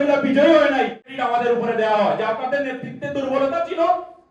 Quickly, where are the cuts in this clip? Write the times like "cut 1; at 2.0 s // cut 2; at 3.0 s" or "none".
cut 1; at 1.0 s